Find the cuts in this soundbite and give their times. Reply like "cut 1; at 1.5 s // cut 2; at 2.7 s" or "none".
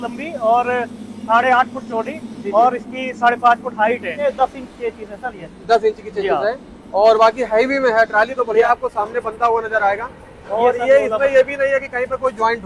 cut 1; at 4.2 s // cut 2; at 8.7 s